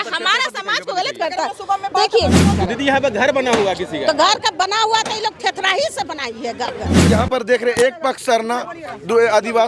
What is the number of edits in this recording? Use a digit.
2